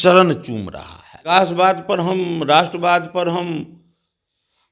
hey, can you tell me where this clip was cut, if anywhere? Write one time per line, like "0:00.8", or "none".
0:01.3